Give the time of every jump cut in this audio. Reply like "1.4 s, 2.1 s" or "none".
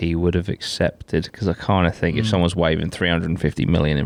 none